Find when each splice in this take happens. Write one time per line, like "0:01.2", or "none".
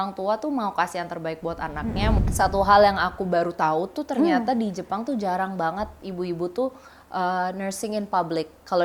0:02.2